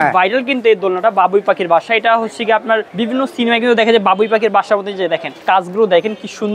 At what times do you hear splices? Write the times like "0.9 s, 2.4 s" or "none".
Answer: 2.9 s, 5.3 s